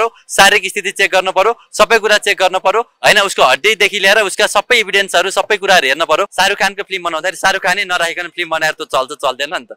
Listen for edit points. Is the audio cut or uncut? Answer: cut